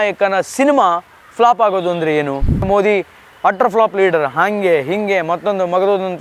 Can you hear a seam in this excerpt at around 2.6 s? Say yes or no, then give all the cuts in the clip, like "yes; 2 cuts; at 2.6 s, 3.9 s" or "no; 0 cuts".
yes; 1 cut; at 2.6 s